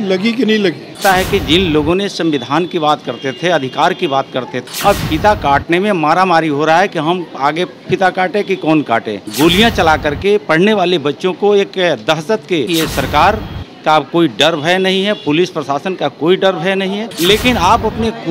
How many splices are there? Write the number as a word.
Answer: five